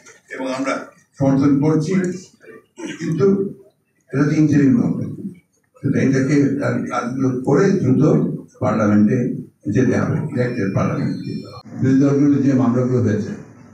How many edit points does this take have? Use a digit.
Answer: 0